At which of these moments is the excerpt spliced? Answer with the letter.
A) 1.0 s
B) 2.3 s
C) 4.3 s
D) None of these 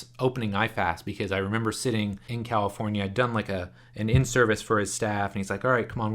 B